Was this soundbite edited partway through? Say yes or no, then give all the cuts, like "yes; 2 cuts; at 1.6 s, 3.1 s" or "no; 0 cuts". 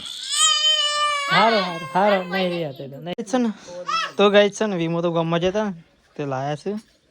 yes; 1 cut; at 3.1 s